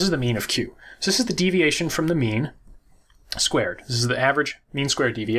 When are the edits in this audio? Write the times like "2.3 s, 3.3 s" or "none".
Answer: 1.6 s